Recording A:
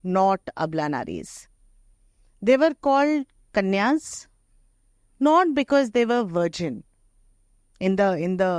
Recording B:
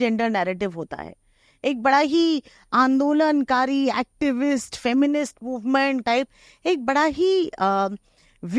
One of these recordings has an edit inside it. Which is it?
B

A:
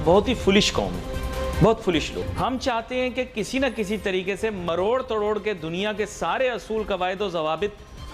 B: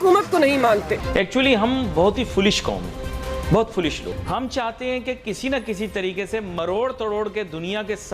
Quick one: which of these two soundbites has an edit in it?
B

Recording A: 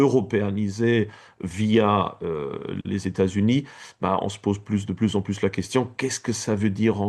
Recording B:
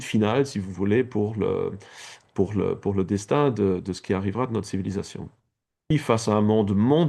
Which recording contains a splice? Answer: B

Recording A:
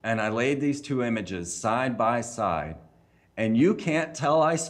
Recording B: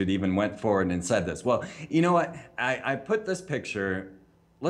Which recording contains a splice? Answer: B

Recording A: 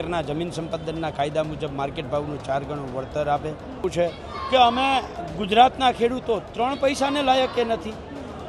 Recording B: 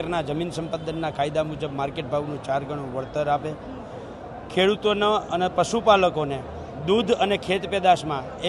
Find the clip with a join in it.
A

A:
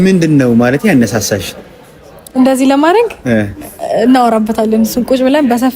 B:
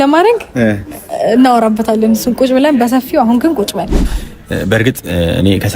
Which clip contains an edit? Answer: B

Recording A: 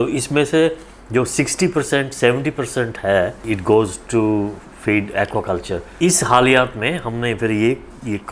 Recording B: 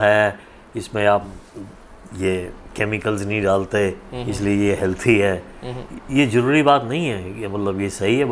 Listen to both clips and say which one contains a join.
A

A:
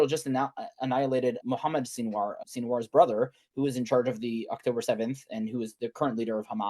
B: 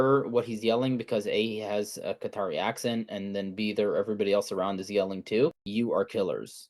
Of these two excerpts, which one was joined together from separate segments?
B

